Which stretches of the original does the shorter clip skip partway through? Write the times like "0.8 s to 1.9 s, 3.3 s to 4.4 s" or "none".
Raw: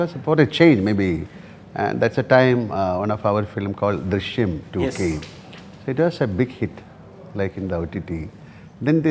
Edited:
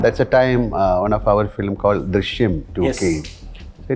none